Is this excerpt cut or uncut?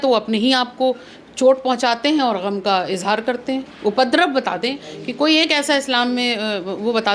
uncut